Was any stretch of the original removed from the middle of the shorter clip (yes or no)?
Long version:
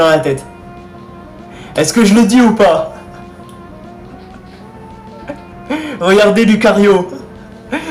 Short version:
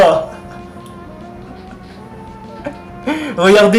no